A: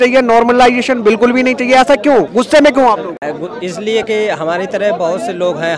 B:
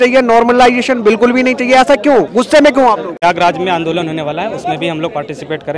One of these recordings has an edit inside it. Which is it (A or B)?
B